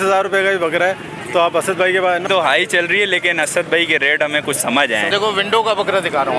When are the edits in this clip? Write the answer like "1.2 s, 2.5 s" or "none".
2.3 s, 5.1 s